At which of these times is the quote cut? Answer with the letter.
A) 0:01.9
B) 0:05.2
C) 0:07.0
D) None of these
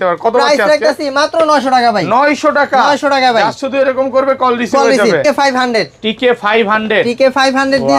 B